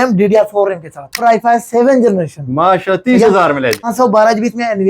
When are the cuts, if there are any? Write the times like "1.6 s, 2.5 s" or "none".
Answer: 1.2 s, 3.9 s